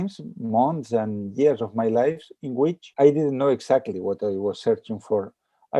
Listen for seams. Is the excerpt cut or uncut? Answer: cut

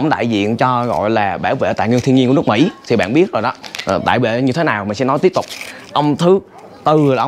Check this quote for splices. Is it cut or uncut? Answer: uncut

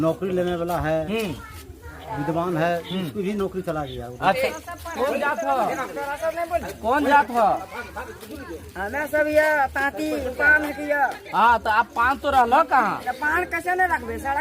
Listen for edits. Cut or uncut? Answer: cut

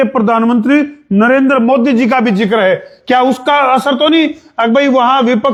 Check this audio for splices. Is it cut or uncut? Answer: uncut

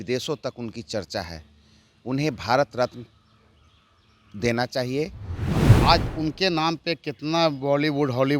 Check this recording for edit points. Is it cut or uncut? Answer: cut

